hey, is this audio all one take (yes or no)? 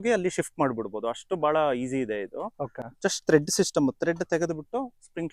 yes